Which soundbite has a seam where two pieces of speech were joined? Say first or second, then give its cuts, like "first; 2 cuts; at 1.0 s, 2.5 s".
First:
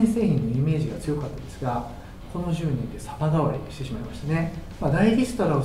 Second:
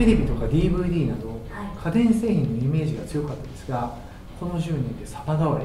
first; 1 cut; at 4.6 s